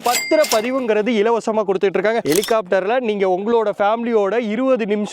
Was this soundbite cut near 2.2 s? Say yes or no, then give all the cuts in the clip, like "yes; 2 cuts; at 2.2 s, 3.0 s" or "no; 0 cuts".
yes; 1 cut; at 2.2 s